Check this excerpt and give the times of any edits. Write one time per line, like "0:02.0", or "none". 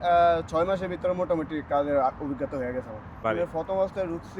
0:03.2